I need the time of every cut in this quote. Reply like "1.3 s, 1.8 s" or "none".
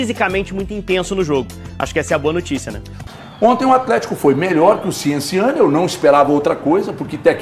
3.0 s